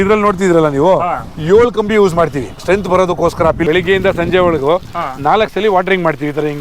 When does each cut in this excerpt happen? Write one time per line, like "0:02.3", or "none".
0:03.6